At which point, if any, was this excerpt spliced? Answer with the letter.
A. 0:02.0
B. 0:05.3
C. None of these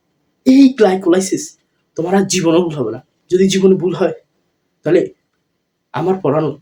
C